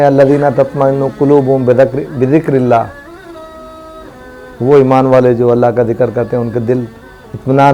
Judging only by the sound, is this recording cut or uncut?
uncut